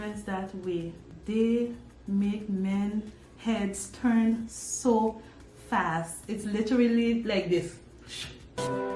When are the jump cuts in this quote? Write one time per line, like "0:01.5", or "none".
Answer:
0:01.1